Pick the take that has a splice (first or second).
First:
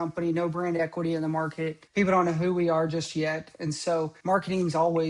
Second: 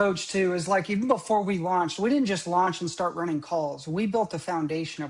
first